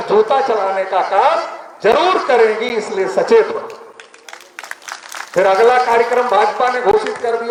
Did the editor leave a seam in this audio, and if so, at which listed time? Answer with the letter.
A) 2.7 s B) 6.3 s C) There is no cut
C